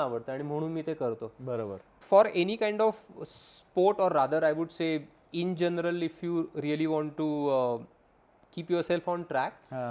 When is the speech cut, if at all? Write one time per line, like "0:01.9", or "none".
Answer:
0:01.9